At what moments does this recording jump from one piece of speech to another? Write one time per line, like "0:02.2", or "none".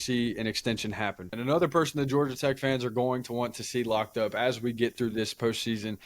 0:01.3